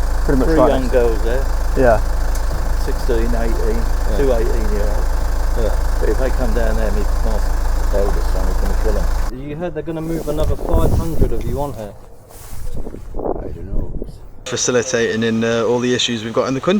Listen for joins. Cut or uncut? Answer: cut